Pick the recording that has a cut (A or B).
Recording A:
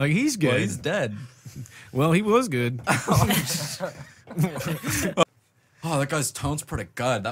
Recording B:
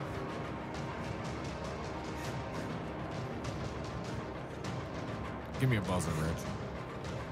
A